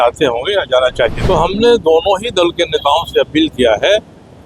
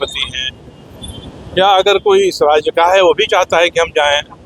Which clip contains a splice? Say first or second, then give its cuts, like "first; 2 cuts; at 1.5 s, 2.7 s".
first; 1 cut; at 1.2 s